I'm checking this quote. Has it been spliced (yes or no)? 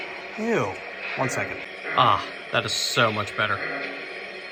no